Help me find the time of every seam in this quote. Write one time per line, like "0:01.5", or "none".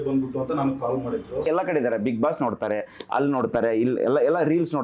0:01.5